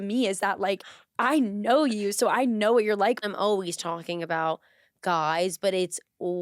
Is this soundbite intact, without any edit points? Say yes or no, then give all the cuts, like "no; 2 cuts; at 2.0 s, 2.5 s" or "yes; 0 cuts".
no; 1 cut; at 3.2 s